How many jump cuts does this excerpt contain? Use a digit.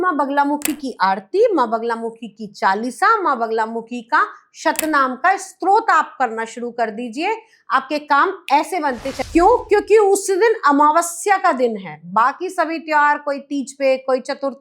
1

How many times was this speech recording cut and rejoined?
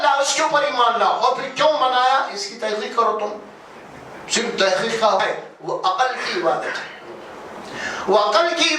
1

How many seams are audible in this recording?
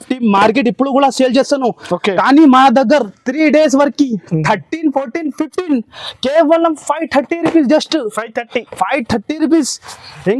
0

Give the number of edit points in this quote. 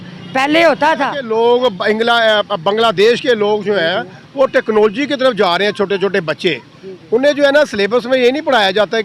1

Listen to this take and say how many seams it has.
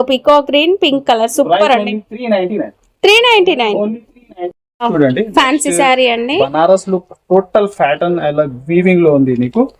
1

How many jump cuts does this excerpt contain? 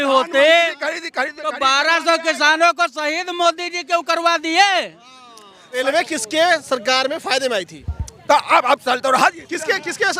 1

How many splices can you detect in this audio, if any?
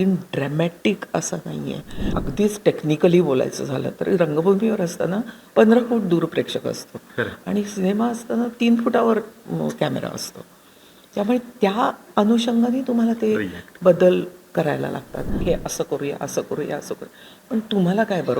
2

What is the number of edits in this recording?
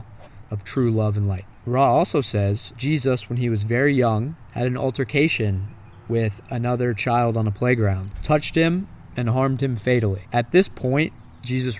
5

